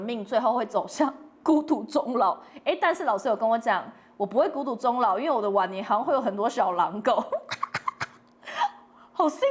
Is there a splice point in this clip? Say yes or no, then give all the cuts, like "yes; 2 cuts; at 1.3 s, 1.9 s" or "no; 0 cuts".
no; 0 cuts